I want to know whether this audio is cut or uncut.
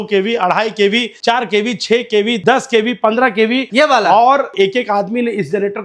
cut